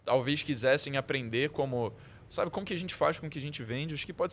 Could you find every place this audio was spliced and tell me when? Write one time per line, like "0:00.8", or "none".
none